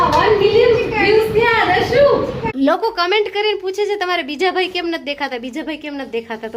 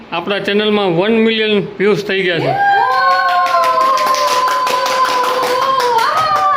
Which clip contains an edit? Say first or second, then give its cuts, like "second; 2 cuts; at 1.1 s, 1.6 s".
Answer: first; 1 cut; at 2.5 s